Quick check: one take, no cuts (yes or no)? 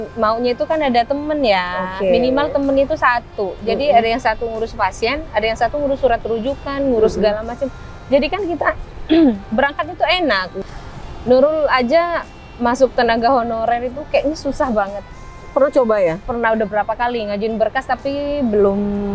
no